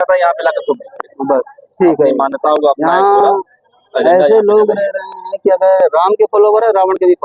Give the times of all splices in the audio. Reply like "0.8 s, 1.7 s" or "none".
none